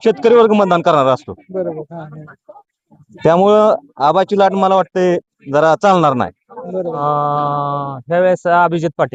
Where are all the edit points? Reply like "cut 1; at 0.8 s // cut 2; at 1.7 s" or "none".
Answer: cut 1; at 7.0 s